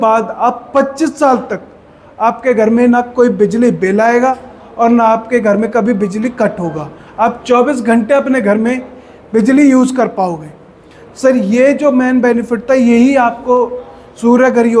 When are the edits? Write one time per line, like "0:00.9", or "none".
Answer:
none